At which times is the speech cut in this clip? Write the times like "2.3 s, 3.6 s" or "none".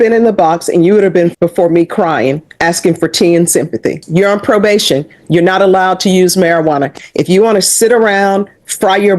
1.3 s, 4.0 s